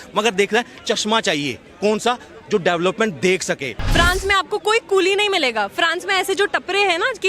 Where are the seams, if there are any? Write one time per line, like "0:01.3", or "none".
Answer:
0:03.8